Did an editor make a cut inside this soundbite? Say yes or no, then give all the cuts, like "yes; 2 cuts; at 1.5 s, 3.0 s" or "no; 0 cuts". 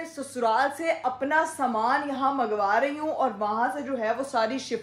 no; 0 cuts